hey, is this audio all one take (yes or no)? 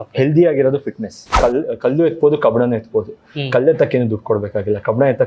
no